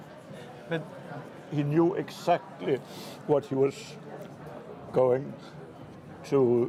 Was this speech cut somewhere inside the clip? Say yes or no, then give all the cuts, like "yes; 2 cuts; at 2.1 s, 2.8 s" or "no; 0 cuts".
no; 0 cuts